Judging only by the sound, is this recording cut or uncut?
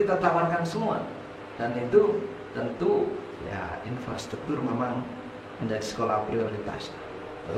uncut